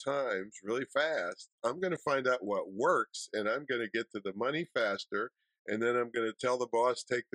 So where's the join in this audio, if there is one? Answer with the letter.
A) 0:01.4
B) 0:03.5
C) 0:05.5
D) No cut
D